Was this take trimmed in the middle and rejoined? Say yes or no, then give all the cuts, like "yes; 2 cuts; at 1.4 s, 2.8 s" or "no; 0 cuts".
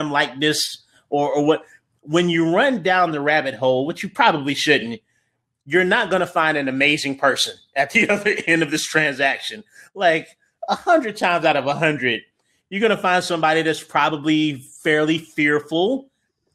no; 0 cuts